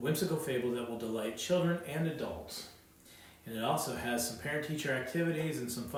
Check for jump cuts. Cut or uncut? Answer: uncut